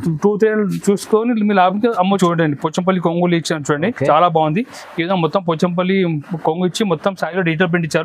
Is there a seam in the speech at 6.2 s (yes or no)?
no